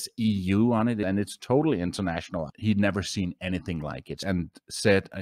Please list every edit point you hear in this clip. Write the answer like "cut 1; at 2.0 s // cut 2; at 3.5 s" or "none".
cut 1; at 1.0 s // cut 2; at 2.5 s // cut 3; at 4.2 s